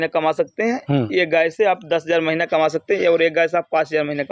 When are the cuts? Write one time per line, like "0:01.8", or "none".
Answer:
none